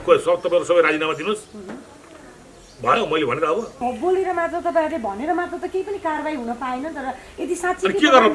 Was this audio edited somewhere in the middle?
yes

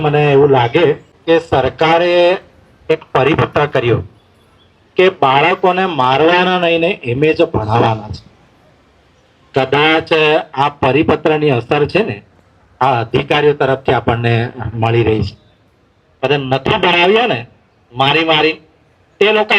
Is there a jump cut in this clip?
yes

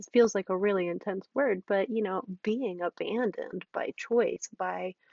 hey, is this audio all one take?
yes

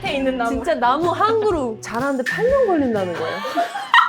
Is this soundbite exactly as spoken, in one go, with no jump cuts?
no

